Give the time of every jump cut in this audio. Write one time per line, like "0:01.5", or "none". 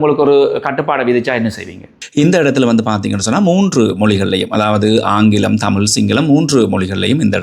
0:02.0